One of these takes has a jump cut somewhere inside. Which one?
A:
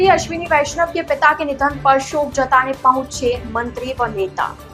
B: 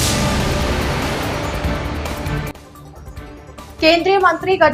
B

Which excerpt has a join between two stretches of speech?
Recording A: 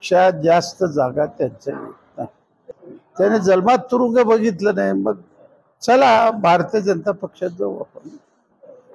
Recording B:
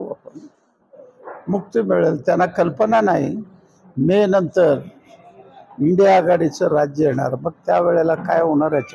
A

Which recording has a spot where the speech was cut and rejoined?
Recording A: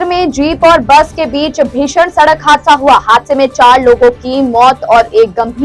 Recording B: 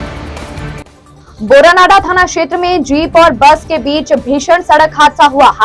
B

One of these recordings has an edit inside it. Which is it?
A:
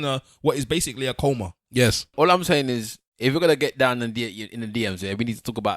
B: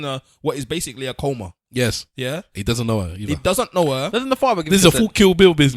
A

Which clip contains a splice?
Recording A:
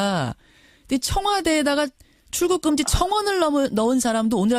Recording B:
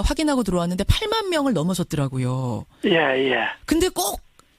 B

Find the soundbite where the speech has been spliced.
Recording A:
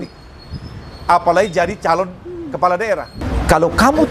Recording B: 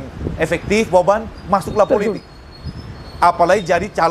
A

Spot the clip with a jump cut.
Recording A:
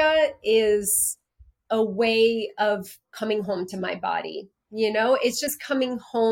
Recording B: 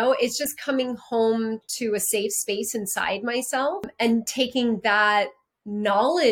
B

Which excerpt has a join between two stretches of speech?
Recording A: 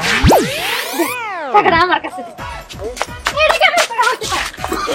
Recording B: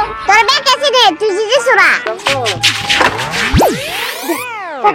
B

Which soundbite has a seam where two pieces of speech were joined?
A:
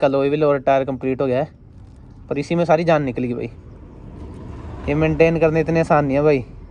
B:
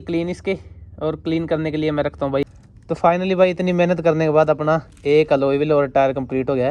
B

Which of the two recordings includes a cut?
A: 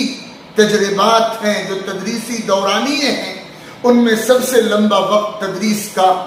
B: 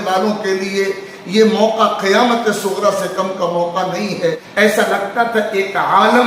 B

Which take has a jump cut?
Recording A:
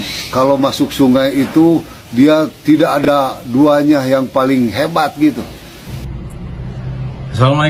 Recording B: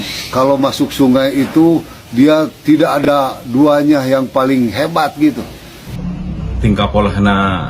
B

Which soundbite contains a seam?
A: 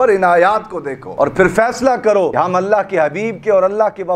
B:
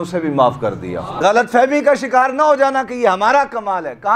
B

